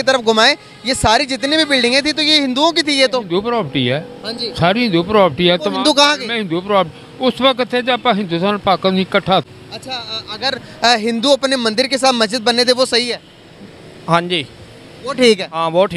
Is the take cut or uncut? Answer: cut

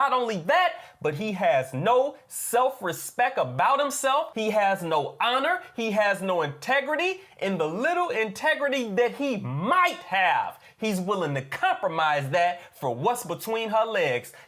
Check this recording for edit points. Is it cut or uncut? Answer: uncut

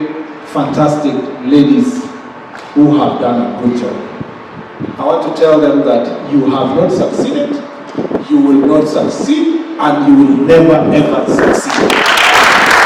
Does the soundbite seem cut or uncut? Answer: uncut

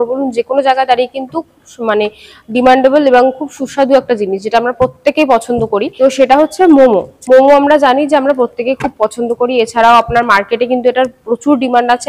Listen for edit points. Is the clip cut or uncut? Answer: uncut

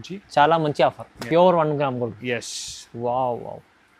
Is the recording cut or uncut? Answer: cut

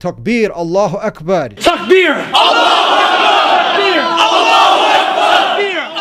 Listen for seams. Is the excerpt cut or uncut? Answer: uncut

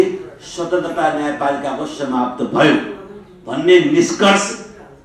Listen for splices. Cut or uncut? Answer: uncut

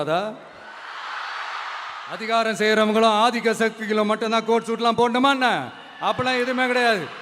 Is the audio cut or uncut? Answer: cut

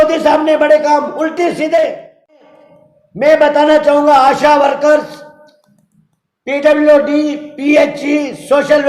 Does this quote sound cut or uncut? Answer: cut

